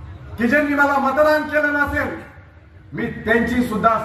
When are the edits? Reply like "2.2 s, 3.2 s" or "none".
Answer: 1.3 s